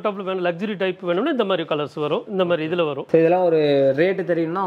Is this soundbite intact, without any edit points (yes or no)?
yes